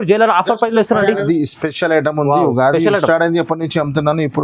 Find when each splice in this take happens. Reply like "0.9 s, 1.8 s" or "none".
1.2 s